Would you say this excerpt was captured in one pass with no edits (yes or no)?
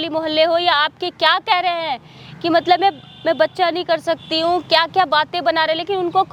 yes